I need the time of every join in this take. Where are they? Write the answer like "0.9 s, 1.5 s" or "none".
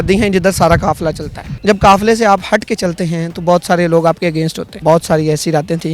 1.5 s, 4.7 s

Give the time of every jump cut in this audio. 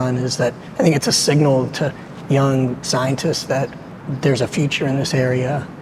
4.0 s

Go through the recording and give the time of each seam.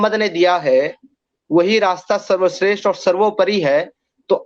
none

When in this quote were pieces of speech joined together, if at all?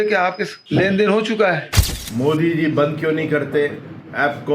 1.7 s

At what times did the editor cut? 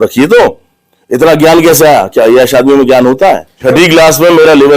3.5 s

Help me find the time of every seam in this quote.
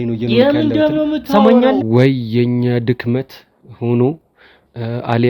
1.8 s

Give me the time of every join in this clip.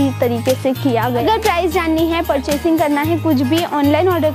1.2 s

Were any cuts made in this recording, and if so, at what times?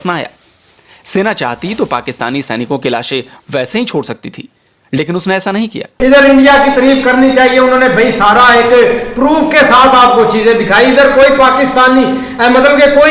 5.9 s

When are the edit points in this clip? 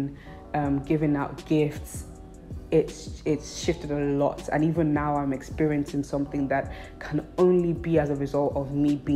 none

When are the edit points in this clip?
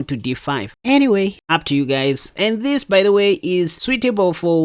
2.3 s

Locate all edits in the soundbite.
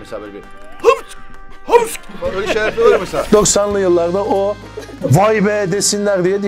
3.3 s

